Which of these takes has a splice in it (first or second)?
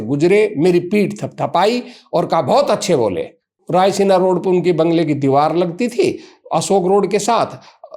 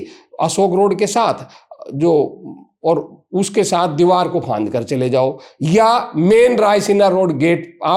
first